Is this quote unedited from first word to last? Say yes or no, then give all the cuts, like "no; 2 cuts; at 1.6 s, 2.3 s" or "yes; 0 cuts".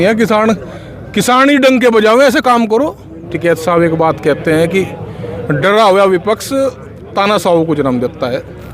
no; 1 cut; at 3.2 s